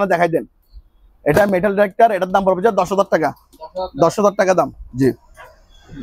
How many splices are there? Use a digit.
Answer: 0